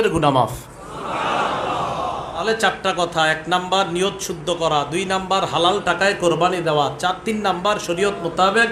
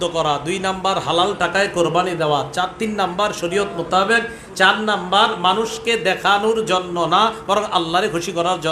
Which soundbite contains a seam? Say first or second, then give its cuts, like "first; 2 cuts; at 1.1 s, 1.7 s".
first; 1 cut; at 2.4 s